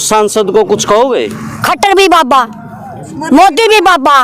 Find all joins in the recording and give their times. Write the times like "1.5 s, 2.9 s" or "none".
1.5 s